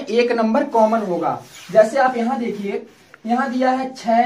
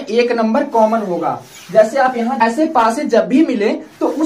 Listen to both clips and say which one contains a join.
second; 1 cut; at 2.4 s

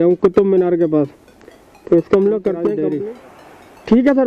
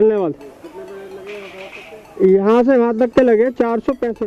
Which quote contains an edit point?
first; 1 cut; at 2.9 s

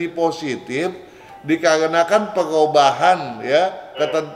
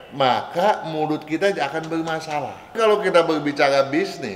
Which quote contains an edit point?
second; 1 cut; at 2.7 s

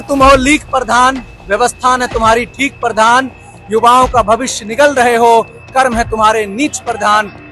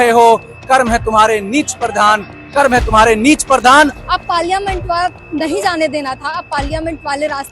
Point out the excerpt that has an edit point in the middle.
second; 1 cut; at 4.0 s

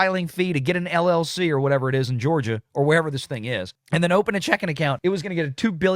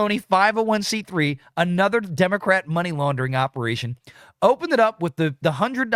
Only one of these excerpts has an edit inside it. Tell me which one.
first; 1 cut; at 5.0 s

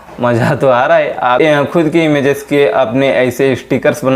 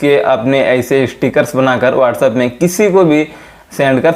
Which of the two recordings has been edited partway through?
first; 1 cut; at 1.4 s

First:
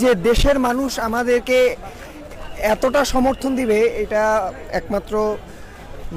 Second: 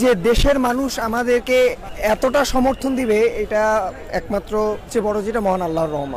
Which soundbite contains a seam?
second; 2 cuts; at 1.9 s, 4.9 s

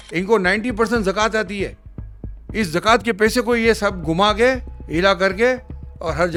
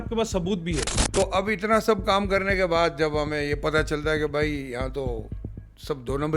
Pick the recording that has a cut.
second; 1 cut; at 1.0 s

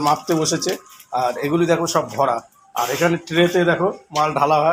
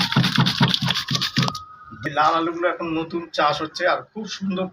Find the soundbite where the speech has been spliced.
second; 1 cut; at 1.9 s

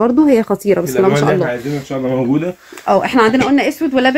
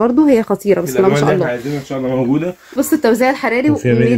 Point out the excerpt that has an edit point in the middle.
second; 1 cut; at 2.6 s

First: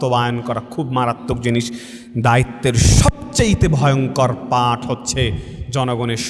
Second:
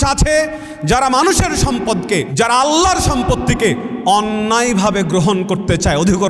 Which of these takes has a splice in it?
second; 1 cut; at 2.3 s

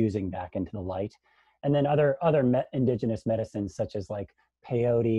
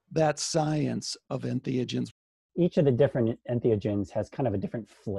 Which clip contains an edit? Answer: second; 2 cuts; at 1.1 s, 2.2 s

